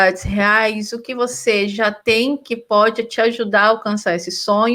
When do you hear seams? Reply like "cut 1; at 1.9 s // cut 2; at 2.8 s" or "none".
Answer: none